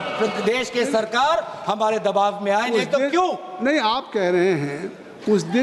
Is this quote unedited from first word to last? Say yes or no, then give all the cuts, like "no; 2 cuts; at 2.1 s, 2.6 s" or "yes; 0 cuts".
yes; 0 cuts